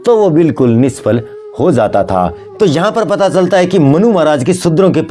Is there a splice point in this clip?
yes; 1 cut; at 2.4 s

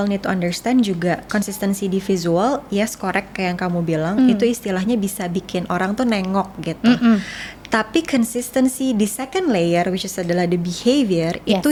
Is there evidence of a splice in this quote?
no; 0 cuts

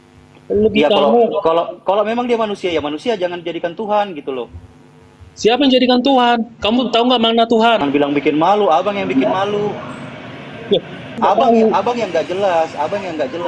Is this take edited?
yes; 2 cuts; at 7.8 s, 11.2 s

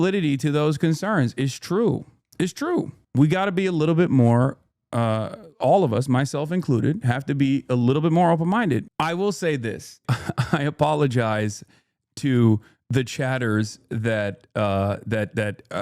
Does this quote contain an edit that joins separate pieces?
yes; 2 cuts; at 8.9 s, 10.0 s

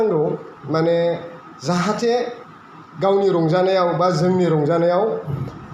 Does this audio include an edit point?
no; 0 cuts

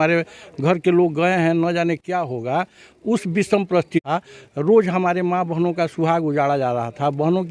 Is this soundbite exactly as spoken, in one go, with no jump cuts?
no; 1 cut; at 4.0 s

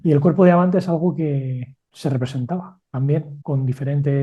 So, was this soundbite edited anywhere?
no; 0 cuts

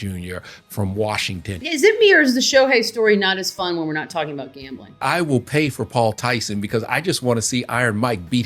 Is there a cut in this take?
yes; 2 cuts; at 1.6 s, 5.0 s

